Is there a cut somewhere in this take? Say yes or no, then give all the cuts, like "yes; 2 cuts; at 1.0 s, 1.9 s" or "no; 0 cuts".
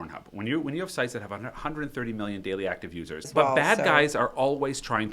yes; 1 cut; at 3.3 s